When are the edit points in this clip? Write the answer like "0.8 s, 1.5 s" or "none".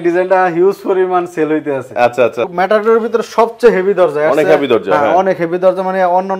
2.5 s